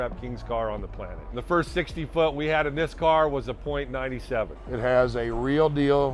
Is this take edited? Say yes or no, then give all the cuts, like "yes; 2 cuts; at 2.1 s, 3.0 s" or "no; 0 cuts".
yes; 2 cuts; at 1.4 s, 4.6 s